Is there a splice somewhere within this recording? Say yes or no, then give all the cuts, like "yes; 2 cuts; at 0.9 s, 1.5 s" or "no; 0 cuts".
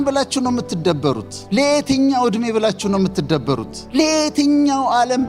yes; 2 cuts; at 1.3 s, 3.8 s